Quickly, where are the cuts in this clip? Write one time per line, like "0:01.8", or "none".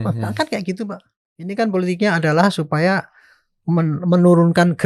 0:01.5